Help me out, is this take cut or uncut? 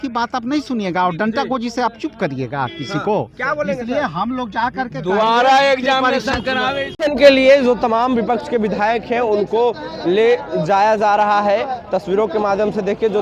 uncut